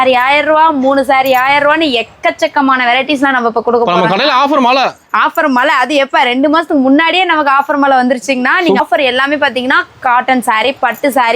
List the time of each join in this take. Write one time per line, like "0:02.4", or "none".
0:08.8